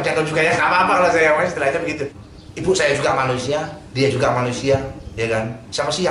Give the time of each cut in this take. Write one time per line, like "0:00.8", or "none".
0:02.2